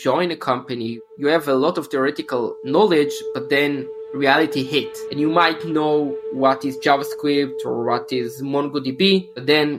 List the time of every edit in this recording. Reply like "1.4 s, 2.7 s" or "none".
1.0 s